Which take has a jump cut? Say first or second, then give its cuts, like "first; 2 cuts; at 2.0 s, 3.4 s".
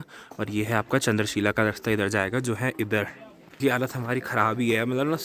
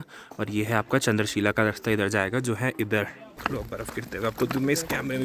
second; 1 cut; at 3.3 s